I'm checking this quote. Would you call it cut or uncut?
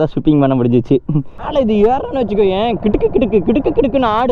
cut